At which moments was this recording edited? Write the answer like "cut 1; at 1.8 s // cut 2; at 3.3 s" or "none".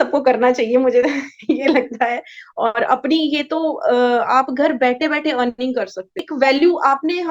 cut 1; at 6.2 s